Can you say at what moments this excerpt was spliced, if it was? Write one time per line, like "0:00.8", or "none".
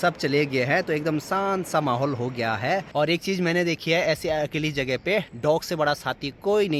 0:02.9